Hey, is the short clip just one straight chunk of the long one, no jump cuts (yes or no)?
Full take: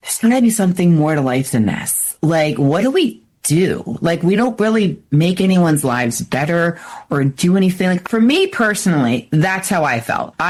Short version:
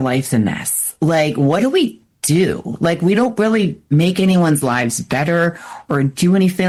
yes